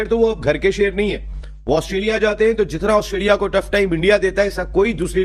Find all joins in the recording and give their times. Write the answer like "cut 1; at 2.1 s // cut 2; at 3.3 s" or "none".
none